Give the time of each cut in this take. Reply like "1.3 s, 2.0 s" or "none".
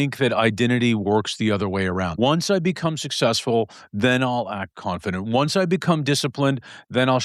2.1 s